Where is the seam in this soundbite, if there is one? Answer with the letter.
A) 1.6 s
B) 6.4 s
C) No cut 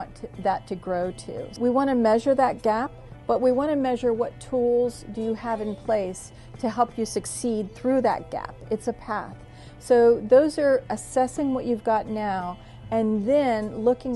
A